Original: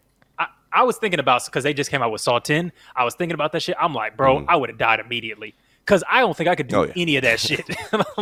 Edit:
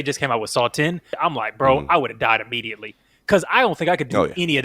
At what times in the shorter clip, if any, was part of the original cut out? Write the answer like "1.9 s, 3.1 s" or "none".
1.1 s